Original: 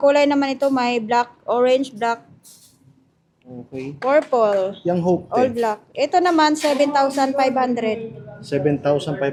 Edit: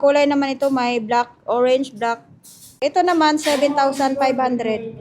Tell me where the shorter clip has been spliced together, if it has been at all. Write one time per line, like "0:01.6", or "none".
0:02.7